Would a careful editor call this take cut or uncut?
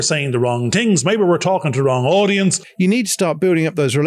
cut